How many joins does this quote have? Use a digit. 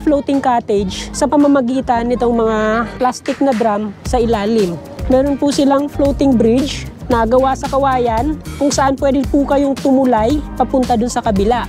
1